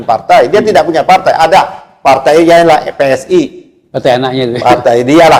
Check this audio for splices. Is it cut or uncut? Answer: uncut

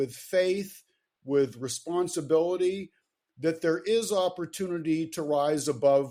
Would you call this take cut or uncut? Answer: uncut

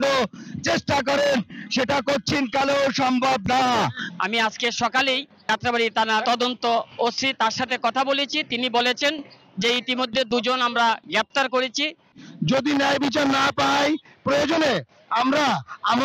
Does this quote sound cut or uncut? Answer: cut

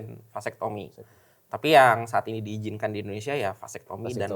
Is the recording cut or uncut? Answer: uncut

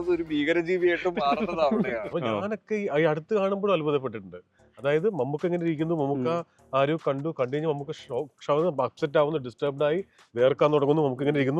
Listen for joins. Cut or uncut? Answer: cut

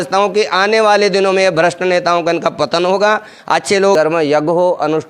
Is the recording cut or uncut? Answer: cut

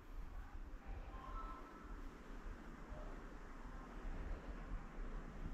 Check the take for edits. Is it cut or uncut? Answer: uncut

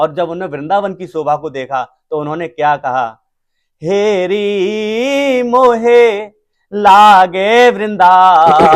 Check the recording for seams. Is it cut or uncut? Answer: uncut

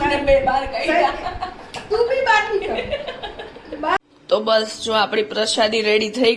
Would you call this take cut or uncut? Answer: cut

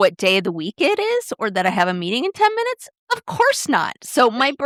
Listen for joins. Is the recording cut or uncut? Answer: uncut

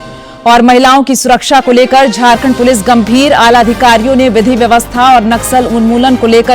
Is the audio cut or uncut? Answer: uncut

